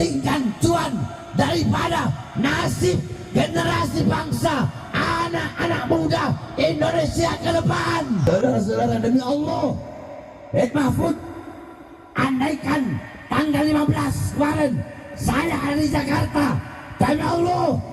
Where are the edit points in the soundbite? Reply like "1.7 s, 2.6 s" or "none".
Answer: 8.3 s